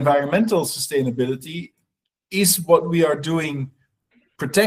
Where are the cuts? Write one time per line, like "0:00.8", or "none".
none